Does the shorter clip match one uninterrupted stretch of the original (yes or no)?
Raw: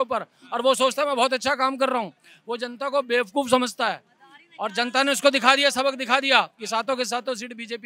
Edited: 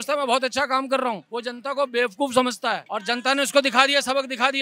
no